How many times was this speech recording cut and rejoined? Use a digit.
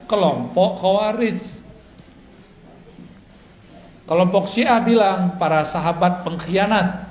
0